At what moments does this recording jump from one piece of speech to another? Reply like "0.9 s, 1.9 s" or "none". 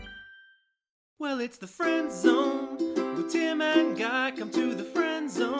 1.1 s